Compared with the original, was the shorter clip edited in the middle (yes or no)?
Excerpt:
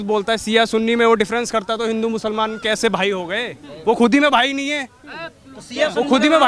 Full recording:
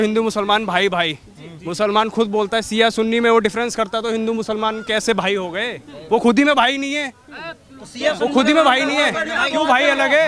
no